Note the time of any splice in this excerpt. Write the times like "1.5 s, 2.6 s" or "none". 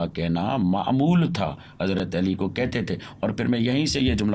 none